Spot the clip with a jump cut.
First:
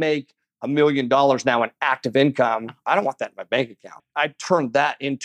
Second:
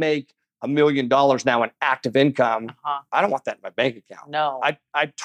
first; 2 cuts; at 2.8 s, 4.0 s

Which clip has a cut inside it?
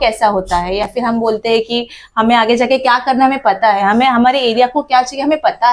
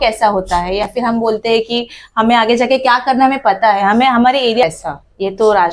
second; 1 cut; at 4.6 s

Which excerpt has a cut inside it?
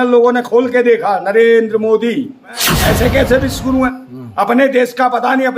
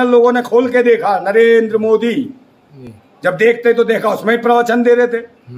first; 1 cut; at 2.7 s

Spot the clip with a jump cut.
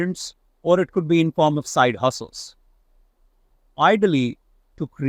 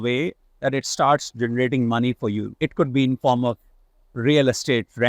second; 1 cut; at 2.5 s

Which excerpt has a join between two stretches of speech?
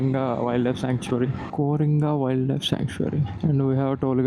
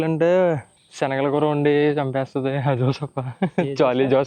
first; 2 cuts; at 1.4 s, 3.3 s

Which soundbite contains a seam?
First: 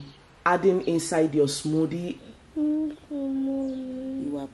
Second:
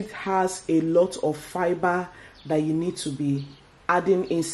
first; 1 cut; at 2.2 s

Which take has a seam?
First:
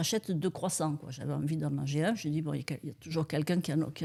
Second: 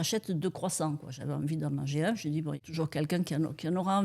second; 1 cut; at 2.6 s

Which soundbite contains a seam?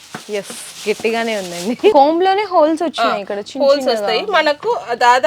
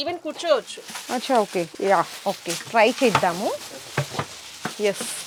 first; 1 cut; at 1.9 s

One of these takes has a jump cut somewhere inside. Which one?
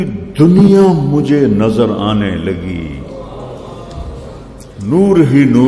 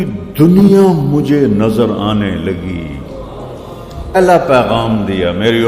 second; 1 cut; at 4.2 s

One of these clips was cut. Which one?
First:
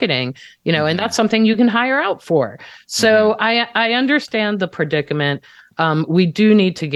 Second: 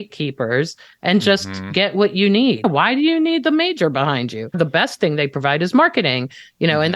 second; 2 cuts; at 2.6 s, 4.6 s

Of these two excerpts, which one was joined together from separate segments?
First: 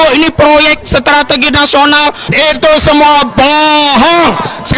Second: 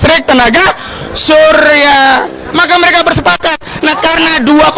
second; 1 cut; at 2.6 s

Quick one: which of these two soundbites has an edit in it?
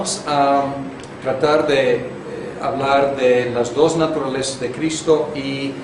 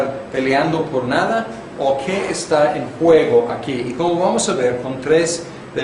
second; 1 cut; at 1.4 s

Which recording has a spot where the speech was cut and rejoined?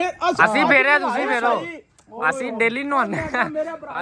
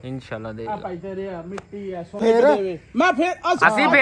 second; 1 cut; at 2.2 s

